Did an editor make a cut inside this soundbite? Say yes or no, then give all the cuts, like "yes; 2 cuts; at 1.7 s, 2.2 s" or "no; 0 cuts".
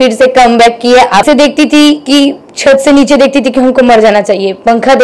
yes; 1 cut; at 1.2 s